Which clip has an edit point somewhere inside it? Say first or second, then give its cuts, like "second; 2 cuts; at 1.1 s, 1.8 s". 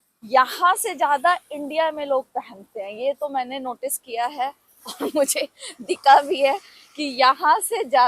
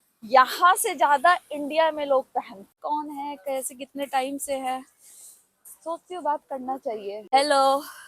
second; 2 cuts; at 2.7 s, 7.3 s